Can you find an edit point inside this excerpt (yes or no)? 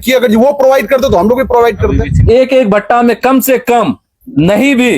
yes